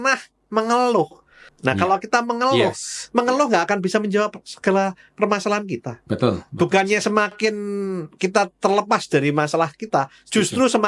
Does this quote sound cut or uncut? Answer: cut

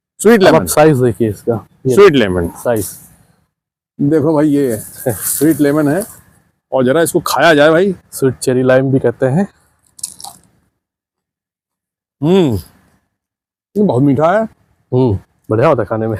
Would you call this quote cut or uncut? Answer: uncut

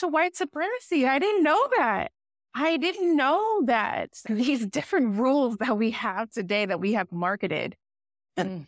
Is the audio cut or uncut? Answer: uncut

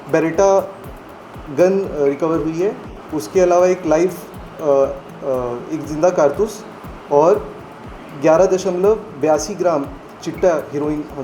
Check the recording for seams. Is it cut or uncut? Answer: uncut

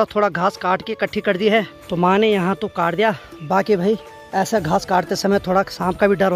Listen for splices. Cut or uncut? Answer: uncut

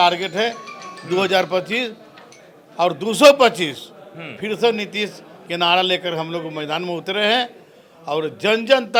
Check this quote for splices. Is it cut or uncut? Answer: uncut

